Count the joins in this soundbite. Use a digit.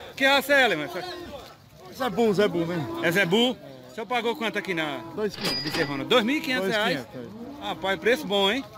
0